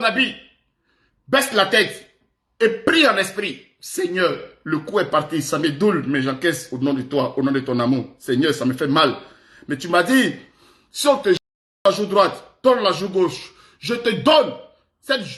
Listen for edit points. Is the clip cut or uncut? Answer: uncut